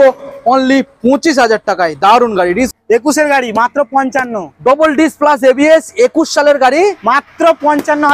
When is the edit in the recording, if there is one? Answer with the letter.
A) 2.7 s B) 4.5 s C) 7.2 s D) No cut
A